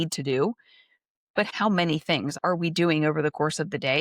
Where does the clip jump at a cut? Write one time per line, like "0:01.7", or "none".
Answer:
0:01.5
0:02.4